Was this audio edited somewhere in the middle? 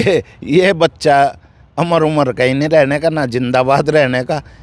no; 0 cuts

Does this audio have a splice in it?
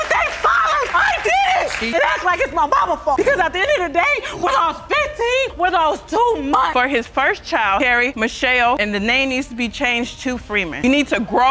yes; 1 cut; at 6.7 s

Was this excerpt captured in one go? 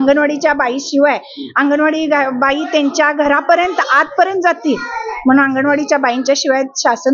yes; 0 cuts

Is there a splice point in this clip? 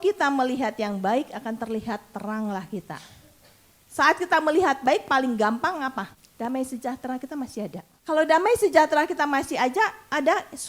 yes; 2 cuts; at 6.2 s, 7.9 s

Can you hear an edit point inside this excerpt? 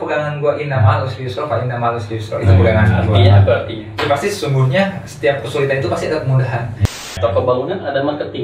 yes; 1 cut; at 6.9 s

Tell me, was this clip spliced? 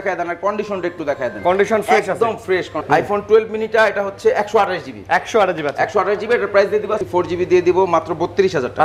yes; 2 cuts; at 2.8 s, 7.0 s

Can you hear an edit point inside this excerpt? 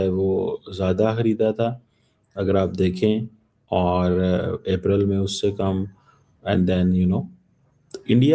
no; 0 cuts

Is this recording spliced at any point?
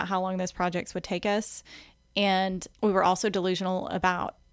yes; 1 cut; at 2.7 s

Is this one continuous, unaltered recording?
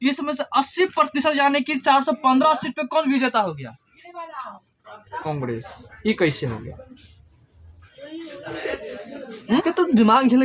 no; 1 cut; at 9.4 s

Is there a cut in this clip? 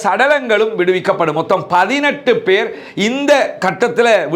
no; 0 cuts

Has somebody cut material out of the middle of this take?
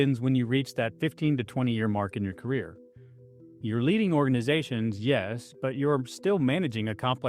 yes; 1 cut; at 5.4 s

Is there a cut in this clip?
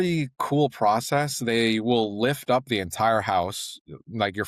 no; 0 cuts

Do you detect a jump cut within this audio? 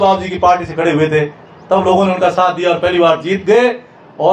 no; 0 cuts

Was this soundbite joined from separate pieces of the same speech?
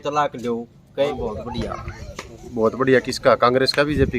yes; 1 cut; at 1.1 s

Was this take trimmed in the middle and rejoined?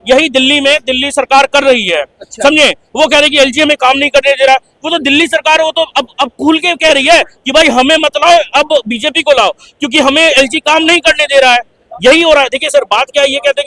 no; 0 cuts

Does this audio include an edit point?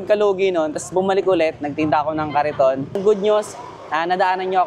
yes; 1 cut; at 2.9 s

